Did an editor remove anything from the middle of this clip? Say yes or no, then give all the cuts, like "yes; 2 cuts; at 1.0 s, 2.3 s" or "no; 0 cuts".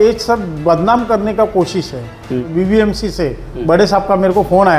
yes; 1 cut; at 2.4 s